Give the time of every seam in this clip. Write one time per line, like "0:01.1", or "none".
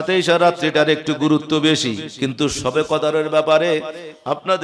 0:02.1